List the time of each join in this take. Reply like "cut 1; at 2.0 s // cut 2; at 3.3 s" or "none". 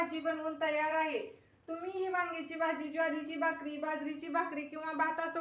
none